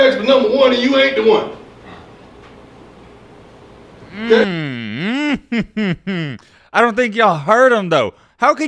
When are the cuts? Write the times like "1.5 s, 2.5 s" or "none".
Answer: none